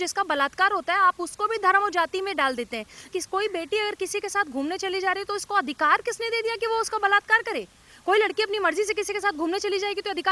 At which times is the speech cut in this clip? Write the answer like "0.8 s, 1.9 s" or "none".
3.1 s